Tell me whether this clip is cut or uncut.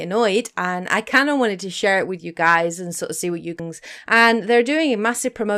uncut